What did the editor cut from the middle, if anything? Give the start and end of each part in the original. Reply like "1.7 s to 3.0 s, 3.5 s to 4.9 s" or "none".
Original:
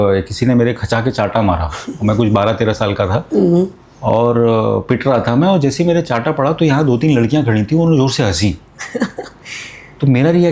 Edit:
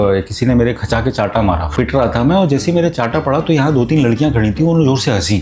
1.7 s to 4.8 s